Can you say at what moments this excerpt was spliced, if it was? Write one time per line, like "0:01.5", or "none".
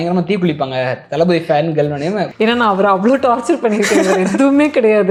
none